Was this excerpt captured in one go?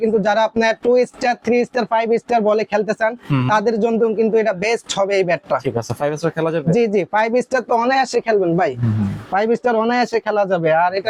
yes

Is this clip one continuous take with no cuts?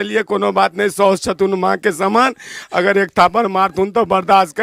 yes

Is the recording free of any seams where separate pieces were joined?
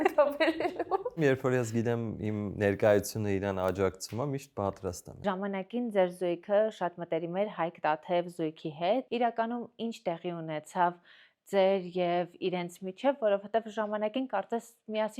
no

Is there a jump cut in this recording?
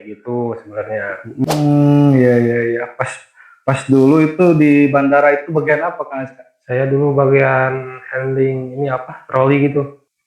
yes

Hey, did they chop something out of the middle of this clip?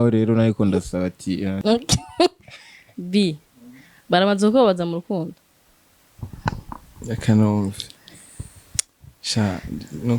yes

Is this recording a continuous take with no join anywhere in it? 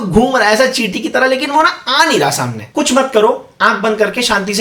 no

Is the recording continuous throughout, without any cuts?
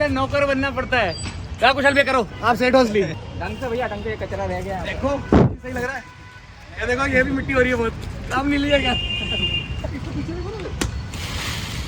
no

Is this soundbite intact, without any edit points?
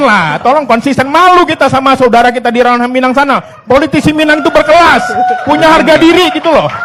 yes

